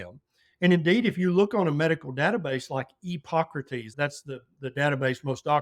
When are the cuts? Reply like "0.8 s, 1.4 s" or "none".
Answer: 3.9 s